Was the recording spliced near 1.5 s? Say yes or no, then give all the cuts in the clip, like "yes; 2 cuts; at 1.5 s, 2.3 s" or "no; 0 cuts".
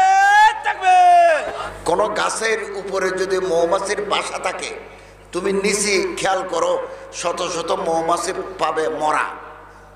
yes; 1 cut; at 1.5 s